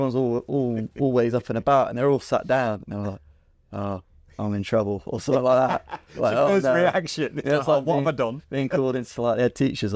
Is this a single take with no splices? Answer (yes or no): yes